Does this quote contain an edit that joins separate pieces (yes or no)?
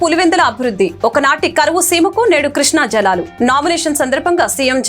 no